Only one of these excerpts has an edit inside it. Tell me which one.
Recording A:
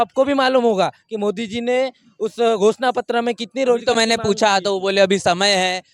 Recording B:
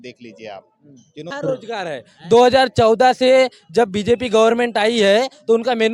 B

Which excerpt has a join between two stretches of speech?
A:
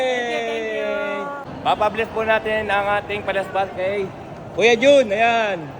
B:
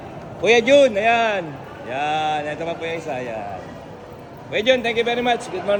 A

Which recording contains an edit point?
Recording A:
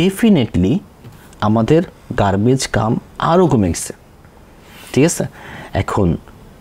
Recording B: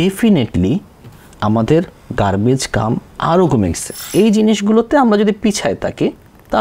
B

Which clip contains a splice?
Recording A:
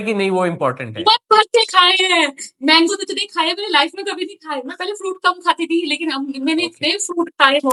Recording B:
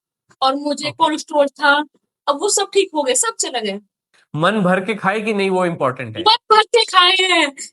B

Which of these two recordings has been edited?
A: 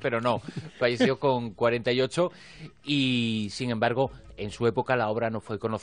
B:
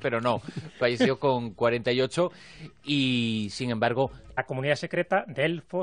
A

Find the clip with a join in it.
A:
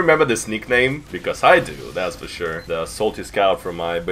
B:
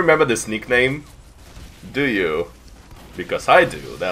A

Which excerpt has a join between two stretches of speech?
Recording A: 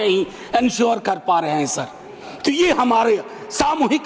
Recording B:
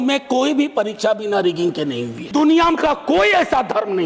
B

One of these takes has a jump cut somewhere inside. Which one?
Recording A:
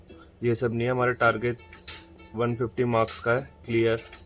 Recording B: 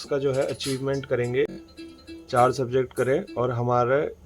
B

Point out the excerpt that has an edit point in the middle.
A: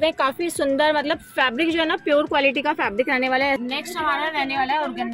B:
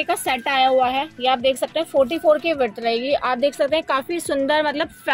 A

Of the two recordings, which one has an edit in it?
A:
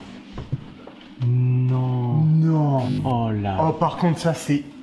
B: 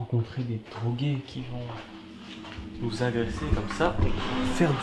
A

